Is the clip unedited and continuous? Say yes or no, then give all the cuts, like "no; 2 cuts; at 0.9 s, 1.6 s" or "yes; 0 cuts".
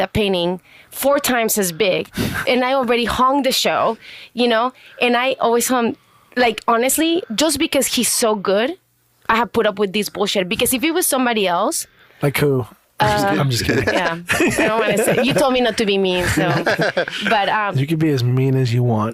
yes; 0 cuts